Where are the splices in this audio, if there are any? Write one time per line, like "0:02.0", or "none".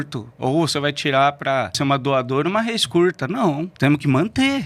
0:01.8
0:03.7